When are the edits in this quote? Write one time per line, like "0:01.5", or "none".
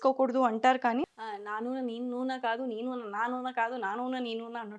0:01.0

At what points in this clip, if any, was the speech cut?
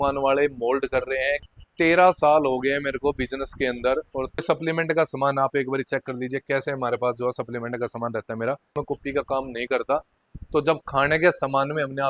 0:01.4
0:04.4
0:08.7

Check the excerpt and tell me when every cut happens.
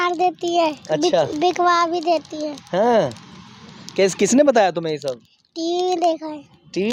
none

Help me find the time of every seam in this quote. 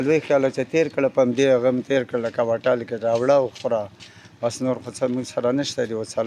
none

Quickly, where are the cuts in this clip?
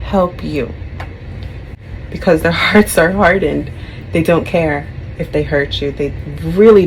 0:01.4

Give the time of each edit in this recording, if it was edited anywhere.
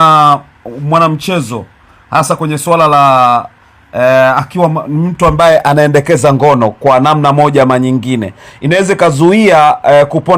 none

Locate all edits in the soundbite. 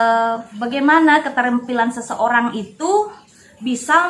none

